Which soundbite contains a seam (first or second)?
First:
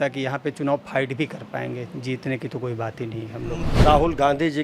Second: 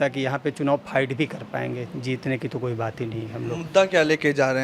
first